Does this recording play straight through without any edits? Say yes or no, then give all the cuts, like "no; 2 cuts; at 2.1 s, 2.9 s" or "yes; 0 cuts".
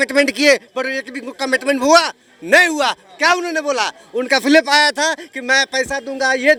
yes; 0 cuts